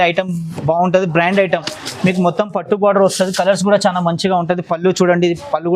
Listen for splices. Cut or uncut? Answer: cut